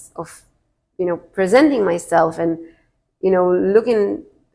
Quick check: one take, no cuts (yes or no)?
yes